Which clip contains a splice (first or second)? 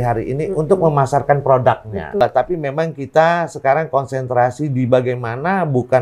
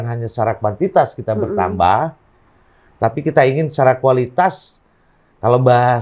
first